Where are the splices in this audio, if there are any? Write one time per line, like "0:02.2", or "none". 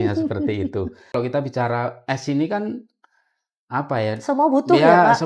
0:01.1